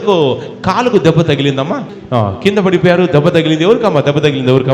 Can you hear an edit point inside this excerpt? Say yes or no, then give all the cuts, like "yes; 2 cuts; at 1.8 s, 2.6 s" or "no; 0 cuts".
yes; 1 cut; at 1.8 s